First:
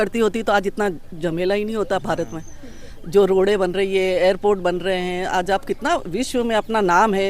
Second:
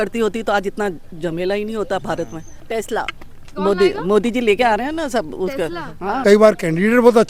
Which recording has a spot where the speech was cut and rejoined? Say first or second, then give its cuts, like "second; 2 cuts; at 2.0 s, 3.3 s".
second; 2 cuts; at 2.6 s, 6.1 s